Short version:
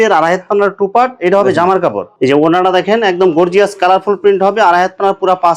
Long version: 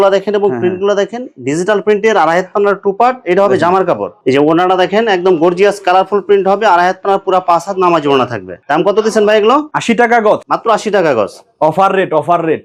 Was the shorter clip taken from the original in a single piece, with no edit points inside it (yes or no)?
yes